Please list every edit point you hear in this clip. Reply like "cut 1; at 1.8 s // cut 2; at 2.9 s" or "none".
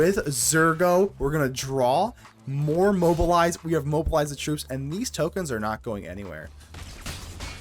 cut 1; at 6.6 s